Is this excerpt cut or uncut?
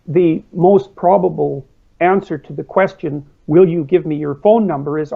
uncut